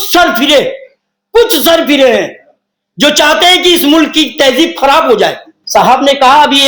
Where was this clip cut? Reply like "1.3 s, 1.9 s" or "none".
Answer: 5.5 s